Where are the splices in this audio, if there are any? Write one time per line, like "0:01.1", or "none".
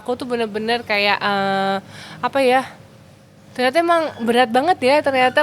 none